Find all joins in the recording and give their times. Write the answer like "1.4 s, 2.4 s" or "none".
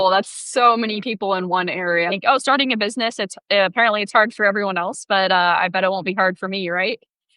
2.1 s